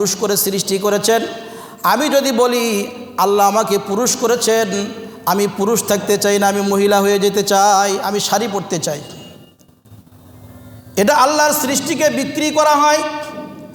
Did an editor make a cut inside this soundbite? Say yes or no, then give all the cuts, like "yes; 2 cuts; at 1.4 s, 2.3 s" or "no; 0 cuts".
no; 0 cuts